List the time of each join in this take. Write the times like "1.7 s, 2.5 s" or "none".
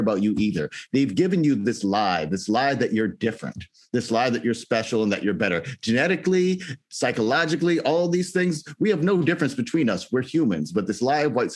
none